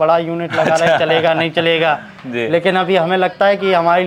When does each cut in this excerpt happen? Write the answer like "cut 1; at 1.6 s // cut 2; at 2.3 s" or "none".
none